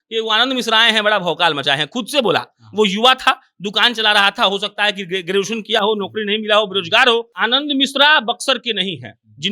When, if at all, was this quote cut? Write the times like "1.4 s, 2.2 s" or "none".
7.3 s